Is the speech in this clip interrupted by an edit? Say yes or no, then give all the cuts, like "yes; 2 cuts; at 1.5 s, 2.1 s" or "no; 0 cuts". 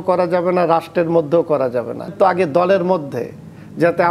yes; 1 cut; at 2.1 s